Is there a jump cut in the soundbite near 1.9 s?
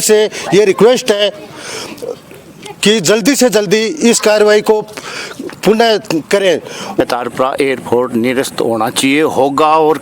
no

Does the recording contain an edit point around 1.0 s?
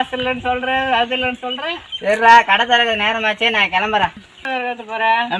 no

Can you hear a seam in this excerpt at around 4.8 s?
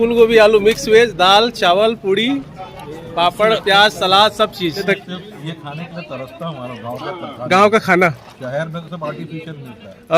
yes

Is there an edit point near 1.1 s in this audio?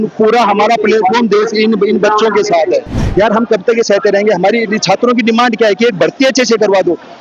no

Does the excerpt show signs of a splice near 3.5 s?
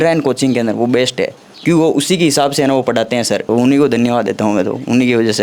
yes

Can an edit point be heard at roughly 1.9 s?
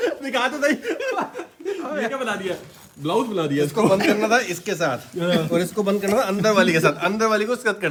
no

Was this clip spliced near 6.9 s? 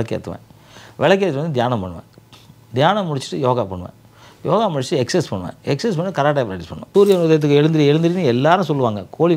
yes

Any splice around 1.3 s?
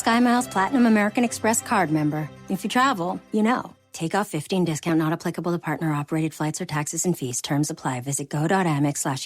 yes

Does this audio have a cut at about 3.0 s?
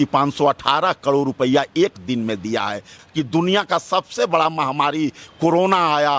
yes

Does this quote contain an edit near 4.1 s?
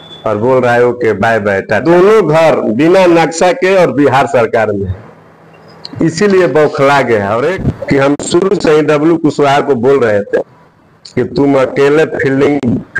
no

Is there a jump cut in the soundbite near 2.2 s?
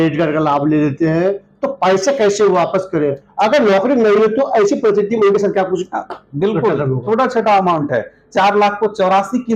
no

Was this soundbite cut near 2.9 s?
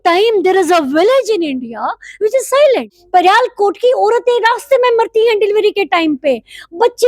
yes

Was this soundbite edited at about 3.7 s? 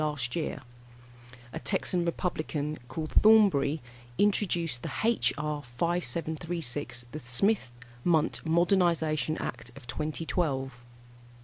no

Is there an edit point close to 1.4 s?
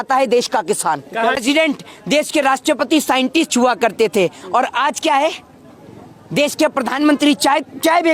yes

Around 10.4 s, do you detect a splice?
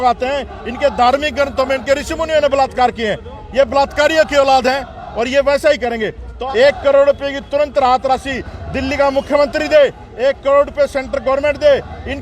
no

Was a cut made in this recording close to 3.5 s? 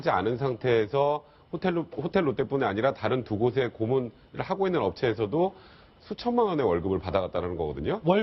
no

